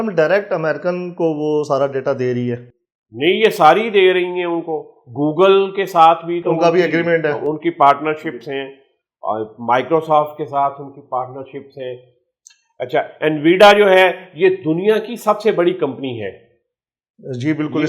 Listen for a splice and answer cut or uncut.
uncut